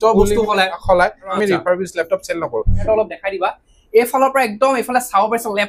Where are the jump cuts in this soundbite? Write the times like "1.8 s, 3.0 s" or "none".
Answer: 1.3 s, 2.8 s